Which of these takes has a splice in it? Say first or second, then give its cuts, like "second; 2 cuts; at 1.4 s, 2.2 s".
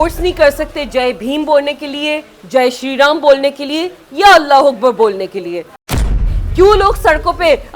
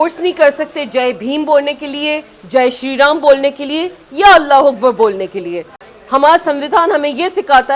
first; 1 cut; at 6.1 s